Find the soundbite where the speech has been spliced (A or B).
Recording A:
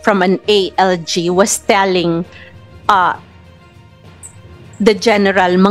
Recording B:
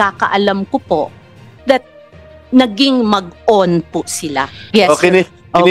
B